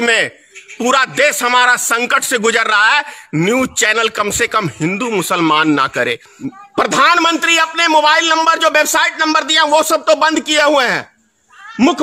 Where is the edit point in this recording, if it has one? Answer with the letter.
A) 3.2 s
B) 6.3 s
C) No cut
B